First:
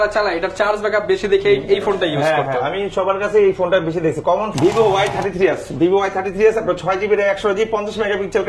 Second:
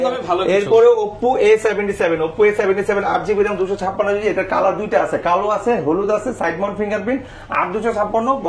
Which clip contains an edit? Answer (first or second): first